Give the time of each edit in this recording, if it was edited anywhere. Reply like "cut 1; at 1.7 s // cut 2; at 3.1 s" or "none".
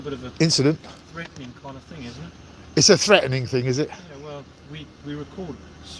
none

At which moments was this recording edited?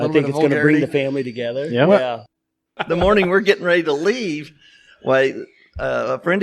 cut 1; at 2.5 s

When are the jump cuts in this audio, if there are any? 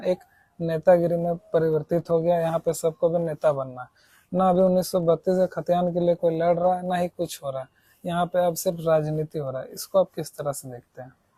none

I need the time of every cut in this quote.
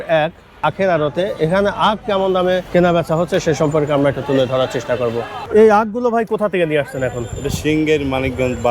cut 1; at 2.6 s // cut 2; at 5.4 s

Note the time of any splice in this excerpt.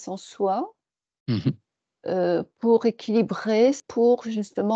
cut 1; at 3.8 s

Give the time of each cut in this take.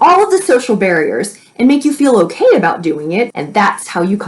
cut 1; at 3.3 s

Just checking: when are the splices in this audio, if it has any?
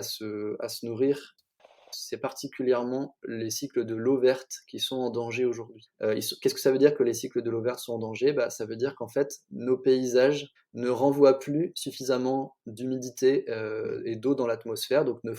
cut 1; at 1.7 s

